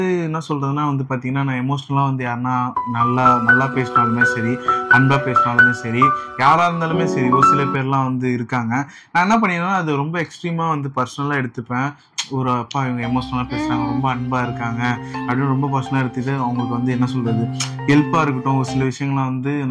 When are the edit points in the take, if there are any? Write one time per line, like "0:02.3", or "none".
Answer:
none